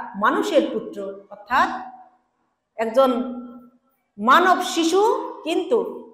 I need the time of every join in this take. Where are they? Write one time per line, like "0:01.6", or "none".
none